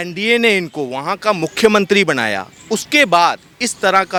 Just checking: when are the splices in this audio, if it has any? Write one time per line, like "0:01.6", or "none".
none